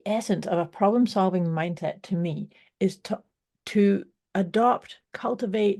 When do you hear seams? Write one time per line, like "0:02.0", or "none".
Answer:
none